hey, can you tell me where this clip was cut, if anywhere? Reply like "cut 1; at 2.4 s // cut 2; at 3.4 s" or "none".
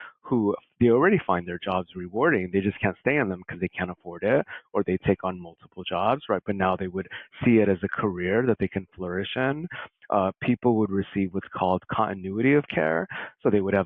none